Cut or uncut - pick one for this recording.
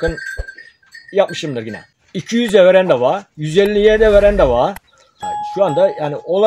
cut